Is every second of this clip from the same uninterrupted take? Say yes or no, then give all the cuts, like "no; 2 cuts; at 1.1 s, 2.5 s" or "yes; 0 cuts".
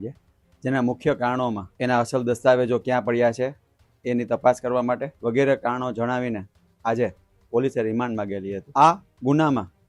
no; 3 cuts; at 1.7 s, 5.1 s, 8.6 s